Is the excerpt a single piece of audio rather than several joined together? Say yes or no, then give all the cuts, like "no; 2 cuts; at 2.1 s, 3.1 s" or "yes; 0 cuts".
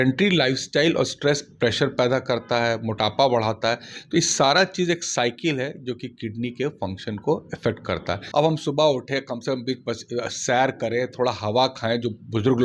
no; 1 cut; at 8.1 s